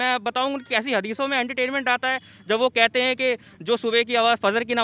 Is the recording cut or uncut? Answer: uncut